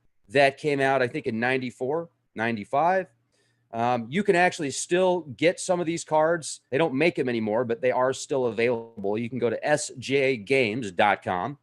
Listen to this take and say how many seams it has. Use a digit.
1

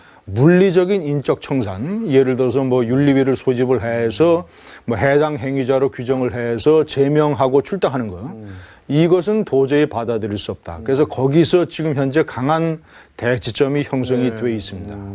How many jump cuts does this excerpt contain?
1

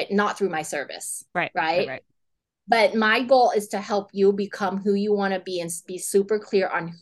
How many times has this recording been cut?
0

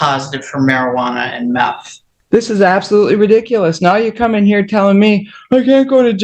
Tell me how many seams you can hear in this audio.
1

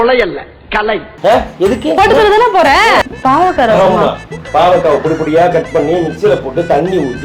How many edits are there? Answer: 1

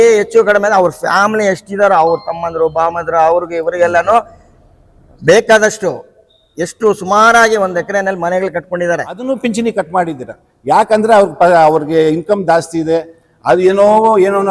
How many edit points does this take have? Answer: 1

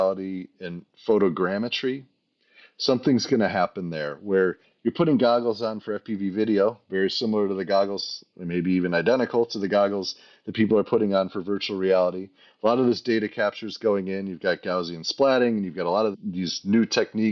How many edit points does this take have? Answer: 1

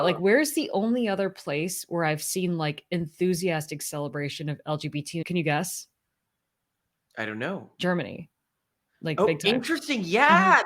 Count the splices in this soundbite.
1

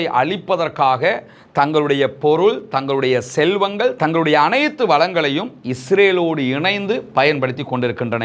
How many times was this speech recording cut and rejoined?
0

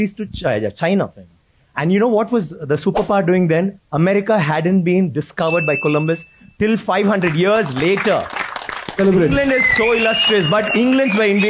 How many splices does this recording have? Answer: 1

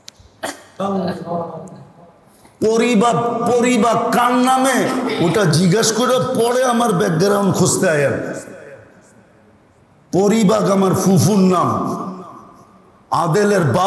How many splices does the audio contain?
0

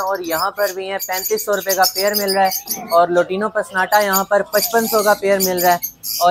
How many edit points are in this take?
0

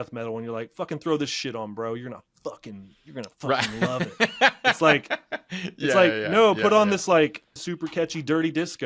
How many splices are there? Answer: 1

